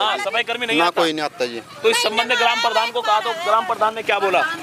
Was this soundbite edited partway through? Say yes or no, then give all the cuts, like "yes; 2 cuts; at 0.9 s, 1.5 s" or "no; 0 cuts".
no; 0 cuts